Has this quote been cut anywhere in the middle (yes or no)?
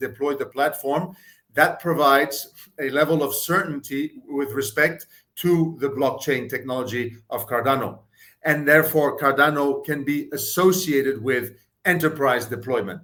no